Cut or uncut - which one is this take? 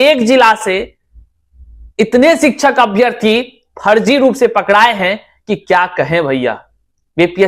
uncut